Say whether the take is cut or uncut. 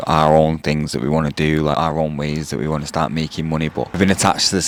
uncut